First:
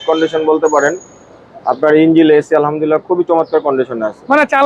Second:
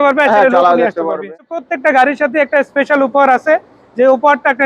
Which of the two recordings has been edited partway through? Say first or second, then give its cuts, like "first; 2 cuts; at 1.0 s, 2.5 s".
second; 1 cut; at 1.6 s